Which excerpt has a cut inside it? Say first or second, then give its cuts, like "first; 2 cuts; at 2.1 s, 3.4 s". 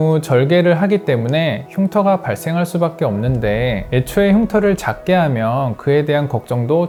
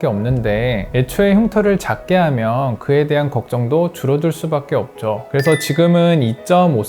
second; 1 cut; at 5.2 s